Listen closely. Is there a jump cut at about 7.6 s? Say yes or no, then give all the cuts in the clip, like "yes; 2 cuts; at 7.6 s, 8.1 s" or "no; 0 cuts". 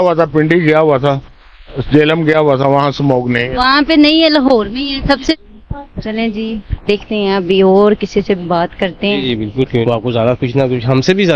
no; 2 cuts; at 5.4 s, 9.8 s